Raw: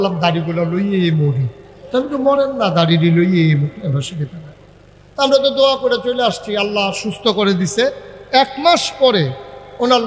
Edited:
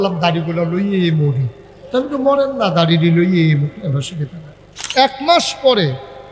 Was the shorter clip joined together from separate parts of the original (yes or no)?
yes